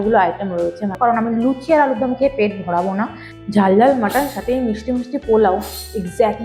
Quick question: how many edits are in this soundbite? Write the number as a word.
two